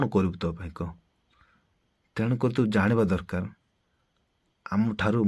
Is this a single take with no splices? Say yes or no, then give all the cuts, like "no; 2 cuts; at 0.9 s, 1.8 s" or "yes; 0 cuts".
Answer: no; 1 cut; at 1.3 s